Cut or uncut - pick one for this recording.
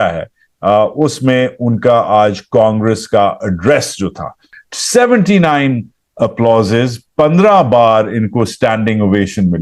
cut